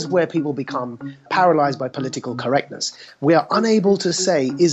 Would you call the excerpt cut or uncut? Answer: cut